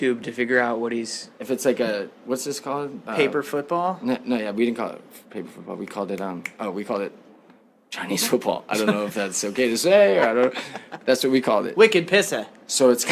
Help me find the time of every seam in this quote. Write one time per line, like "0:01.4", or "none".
0:06.5